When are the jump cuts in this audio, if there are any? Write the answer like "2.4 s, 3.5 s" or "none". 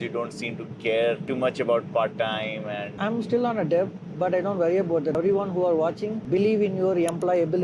3.0 s, 5.2 s